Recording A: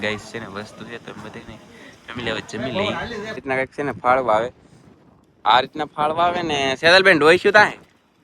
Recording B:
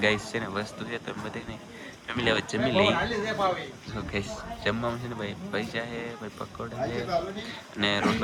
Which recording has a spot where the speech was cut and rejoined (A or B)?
A